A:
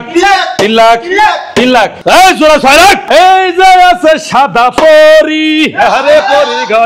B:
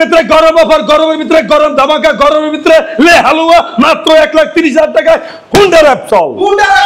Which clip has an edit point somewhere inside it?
A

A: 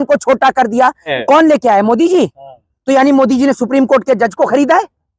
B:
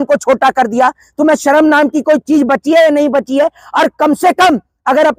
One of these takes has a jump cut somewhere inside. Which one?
A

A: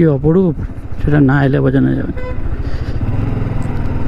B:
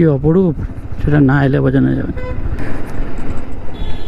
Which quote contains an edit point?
B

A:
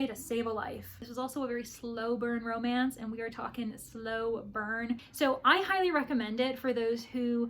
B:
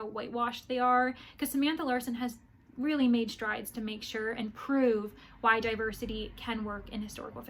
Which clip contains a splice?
A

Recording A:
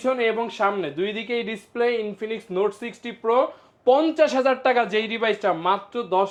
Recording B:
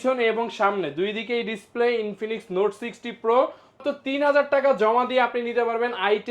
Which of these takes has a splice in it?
B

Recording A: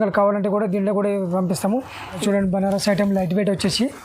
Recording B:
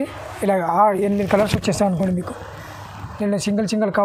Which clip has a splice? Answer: A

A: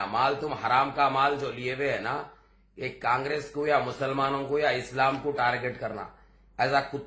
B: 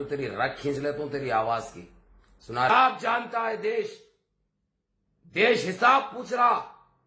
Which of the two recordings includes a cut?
B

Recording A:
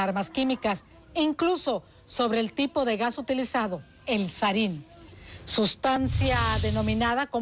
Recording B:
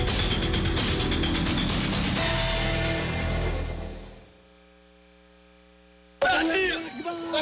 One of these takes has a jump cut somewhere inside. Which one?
A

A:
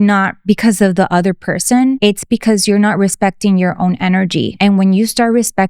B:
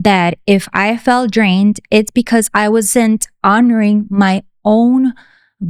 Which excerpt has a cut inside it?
A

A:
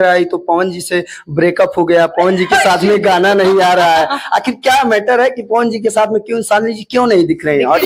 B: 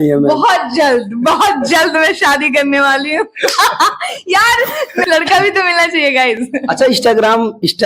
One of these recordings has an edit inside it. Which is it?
B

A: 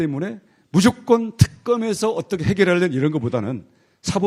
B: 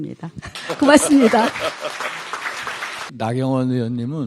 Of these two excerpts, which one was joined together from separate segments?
B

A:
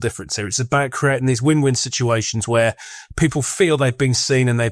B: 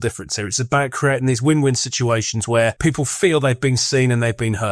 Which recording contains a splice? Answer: B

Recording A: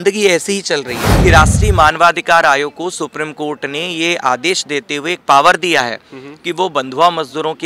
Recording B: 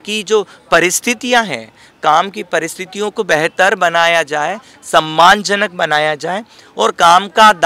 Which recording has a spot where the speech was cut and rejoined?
A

